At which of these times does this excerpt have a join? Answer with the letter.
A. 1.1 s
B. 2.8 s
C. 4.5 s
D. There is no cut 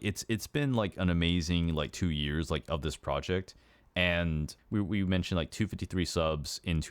C